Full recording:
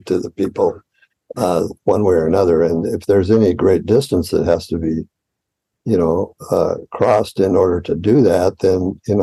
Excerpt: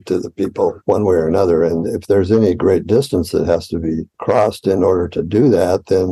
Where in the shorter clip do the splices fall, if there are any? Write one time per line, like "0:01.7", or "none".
0:00.8
0:04.1